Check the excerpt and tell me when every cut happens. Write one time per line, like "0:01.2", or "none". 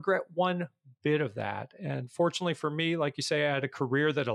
none